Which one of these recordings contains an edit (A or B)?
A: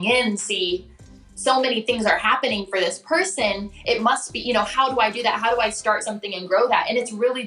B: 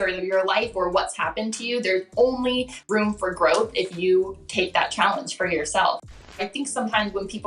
B